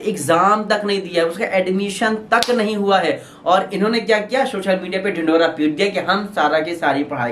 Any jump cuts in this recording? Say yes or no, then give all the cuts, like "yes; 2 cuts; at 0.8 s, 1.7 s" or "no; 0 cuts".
no; 0 cuts